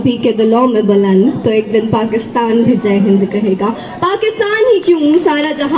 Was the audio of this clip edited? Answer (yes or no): no